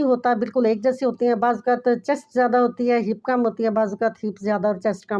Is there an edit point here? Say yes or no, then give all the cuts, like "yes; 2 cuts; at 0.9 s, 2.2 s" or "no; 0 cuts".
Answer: no; 0 cuts